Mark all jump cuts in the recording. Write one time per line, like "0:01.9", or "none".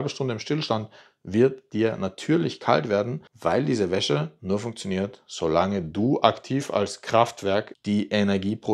0:07.7